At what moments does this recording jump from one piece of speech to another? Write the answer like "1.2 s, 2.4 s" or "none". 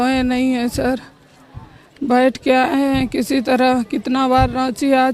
none